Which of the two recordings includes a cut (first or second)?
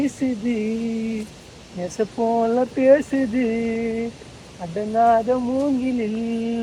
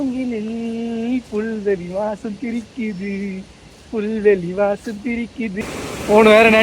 second